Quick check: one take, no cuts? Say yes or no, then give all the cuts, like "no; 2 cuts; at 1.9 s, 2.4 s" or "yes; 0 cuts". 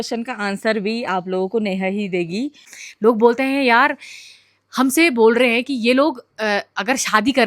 no; 1 cut; at 2.7 s